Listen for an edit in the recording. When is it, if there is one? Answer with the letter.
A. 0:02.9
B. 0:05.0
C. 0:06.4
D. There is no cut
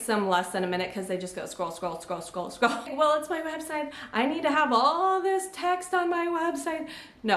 A